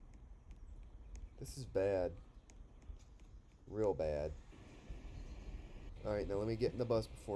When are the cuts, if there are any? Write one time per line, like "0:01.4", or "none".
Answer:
0:05.7